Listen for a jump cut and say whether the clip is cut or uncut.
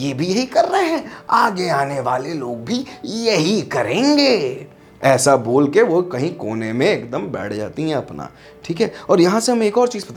uncut